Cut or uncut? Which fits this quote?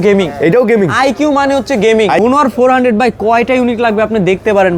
cut